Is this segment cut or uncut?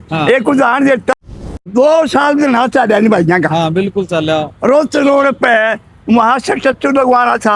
cut